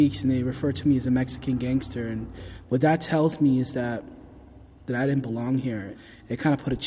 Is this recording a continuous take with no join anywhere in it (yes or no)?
no